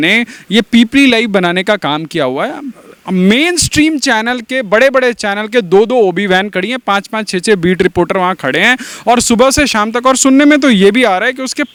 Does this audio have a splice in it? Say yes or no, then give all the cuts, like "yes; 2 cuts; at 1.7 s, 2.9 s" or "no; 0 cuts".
no; 0 cuts